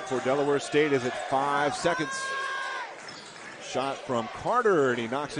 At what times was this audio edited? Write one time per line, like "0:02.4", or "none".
none